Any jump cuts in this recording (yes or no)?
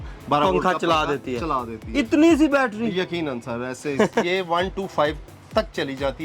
yes